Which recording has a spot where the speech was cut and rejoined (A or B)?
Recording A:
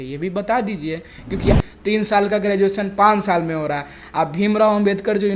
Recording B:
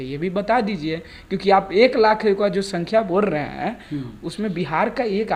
A